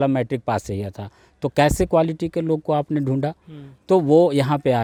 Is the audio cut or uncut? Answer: uncut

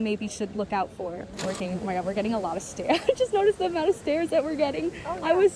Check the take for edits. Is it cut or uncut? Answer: cut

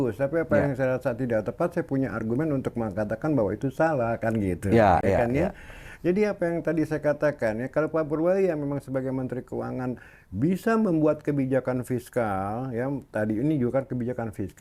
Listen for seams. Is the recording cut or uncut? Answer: uncut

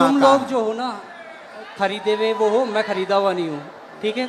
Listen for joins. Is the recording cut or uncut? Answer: uncut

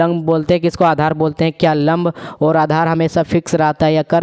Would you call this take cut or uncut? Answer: uncut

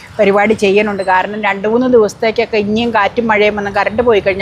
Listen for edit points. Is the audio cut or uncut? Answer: uncut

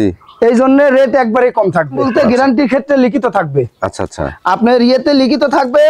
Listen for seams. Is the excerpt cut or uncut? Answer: cut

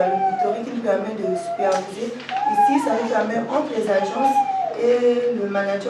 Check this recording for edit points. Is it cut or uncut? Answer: uncut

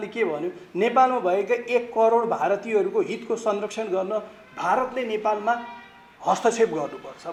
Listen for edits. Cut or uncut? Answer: uncut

